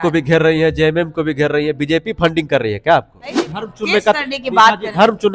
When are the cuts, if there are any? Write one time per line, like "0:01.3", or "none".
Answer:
0:03.4